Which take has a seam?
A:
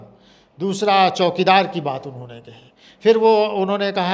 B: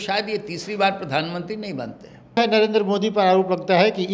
B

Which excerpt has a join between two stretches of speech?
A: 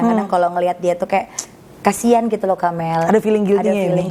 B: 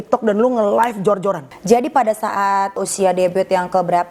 B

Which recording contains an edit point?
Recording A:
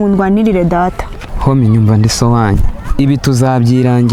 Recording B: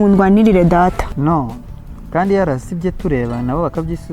B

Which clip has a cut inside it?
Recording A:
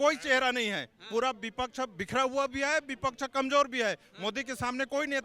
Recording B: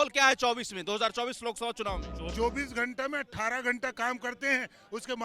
B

